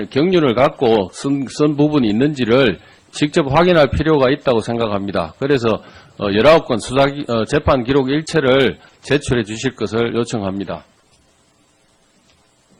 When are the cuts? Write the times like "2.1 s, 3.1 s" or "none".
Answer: 8.9 s